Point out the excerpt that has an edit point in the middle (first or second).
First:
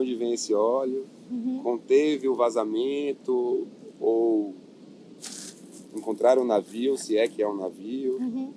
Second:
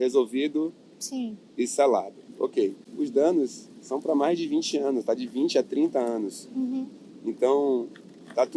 second